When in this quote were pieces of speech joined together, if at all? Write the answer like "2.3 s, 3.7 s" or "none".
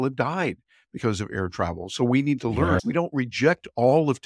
2.8 s